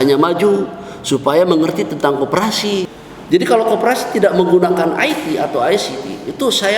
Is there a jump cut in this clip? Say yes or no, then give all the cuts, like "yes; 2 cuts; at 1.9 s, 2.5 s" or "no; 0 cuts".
yes; 1 cut; at 2.9 s